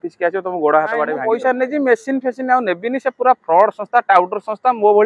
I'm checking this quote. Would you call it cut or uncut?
cut